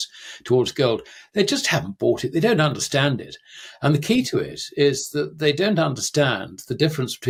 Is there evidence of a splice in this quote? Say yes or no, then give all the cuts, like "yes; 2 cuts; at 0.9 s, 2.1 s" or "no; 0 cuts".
no; 0 cuts